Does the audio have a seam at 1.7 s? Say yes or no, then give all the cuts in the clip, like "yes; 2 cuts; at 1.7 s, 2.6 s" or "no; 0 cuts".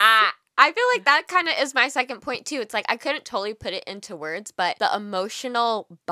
no; 1 cut; at 4.8 s